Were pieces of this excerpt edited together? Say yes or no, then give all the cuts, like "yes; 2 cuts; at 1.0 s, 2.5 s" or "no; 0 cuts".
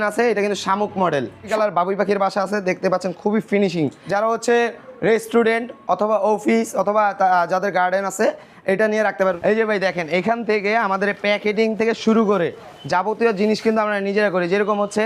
yes; 3 cuts; at 1.4 s, 4.0 s, 9.4 s